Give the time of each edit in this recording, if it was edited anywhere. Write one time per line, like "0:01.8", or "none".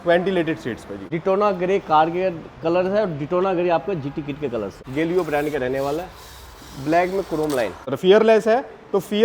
0:00.9
0:04.8
0:07.9